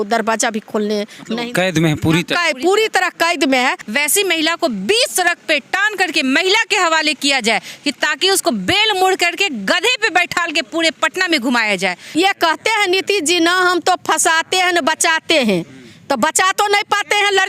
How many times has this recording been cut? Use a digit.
2